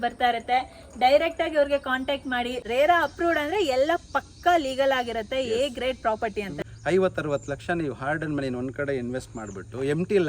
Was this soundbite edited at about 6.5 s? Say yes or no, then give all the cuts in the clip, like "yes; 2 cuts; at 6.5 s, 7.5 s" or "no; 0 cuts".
yes; 2 cuts; at 2.6 s, 6.5 s